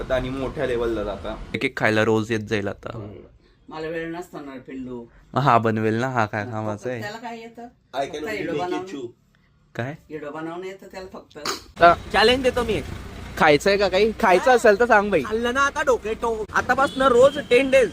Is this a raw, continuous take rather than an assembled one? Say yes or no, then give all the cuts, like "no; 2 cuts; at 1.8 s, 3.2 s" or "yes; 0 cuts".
no; 3 cuts; at 1.6 s, 11.8 s, 16.5 s